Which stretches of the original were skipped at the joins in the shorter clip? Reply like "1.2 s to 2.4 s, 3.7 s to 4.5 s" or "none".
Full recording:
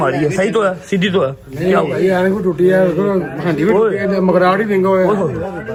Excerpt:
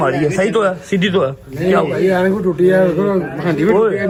none